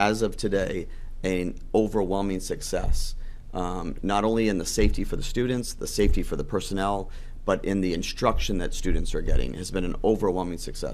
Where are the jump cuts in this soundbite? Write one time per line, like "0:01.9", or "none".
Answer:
none